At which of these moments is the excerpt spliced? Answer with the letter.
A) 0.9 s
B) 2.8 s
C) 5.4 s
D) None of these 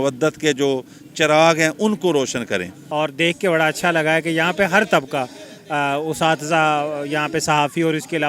B